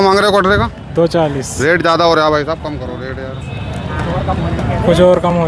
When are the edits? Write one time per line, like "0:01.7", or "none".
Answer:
0:01.5